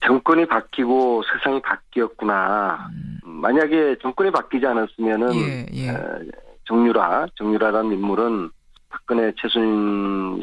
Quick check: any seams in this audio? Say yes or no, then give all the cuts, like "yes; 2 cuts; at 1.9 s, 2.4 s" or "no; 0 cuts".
yes; 1 cut; at 0.9 s